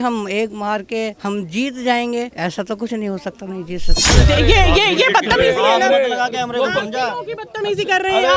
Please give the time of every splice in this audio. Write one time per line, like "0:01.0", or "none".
0:01.2
0:02.3
0:04.0